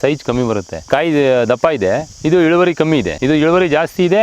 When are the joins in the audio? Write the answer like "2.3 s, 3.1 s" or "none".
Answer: 0.9 s, 2.1 s, 3.1 s